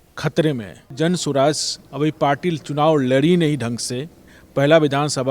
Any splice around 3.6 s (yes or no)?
no